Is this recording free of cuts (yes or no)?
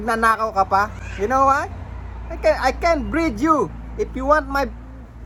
yes